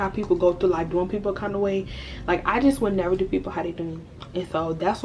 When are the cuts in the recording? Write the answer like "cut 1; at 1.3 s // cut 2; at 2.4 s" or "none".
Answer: none